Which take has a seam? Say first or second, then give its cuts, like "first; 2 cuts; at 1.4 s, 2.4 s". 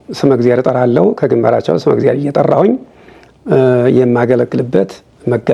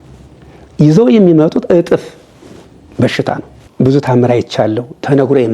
second; 1 cut; at 3.6 s